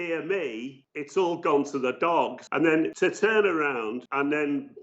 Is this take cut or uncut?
cut